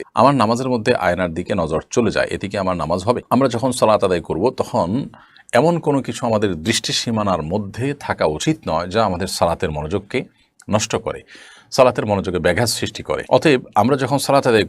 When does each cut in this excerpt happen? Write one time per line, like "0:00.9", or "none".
none